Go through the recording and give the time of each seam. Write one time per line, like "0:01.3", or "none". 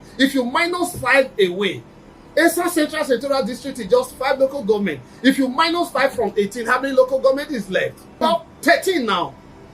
0:08.0